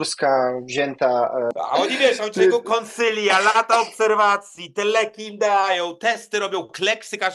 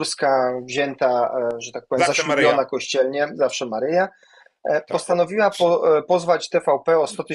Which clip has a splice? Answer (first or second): first